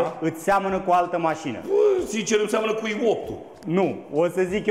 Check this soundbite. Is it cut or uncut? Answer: uncut